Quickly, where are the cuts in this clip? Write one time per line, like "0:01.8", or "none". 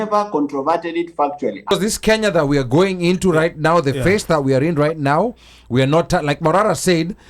0:01.7